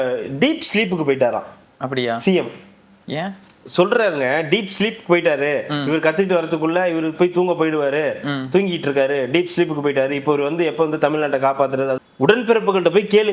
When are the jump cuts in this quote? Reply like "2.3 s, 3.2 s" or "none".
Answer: 12.0 s